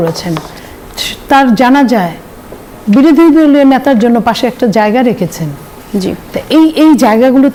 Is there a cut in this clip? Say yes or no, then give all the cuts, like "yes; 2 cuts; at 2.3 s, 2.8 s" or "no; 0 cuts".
no; 0 cuts